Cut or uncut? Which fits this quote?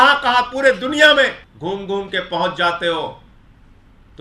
cut